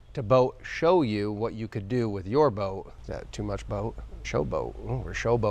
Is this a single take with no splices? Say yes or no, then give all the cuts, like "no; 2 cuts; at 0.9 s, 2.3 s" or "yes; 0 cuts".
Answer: no; 2 cuts; at 2.9 s, 4.1 s